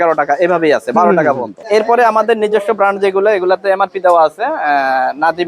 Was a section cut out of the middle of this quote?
no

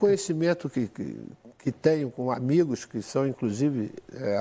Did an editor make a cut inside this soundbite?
no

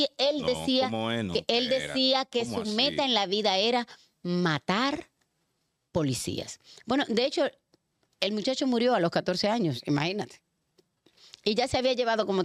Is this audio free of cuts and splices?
yes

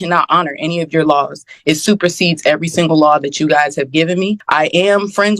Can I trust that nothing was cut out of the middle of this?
no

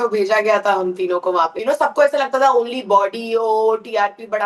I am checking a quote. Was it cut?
yes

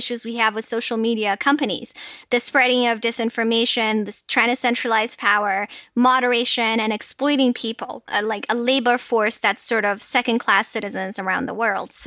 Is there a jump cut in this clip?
no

